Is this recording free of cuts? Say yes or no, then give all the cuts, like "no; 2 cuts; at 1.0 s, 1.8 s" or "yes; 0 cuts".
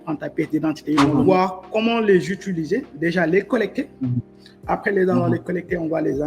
no; 1 cut; at 1.0 s